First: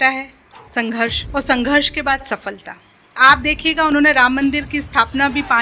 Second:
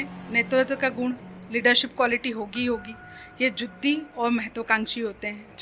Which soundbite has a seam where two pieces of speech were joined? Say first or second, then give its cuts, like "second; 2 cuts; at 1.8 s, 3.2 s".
first; 2 cuts; at 1.2 s, 3.2 s